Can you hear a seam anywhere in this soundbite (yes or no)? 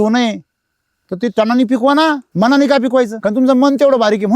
yes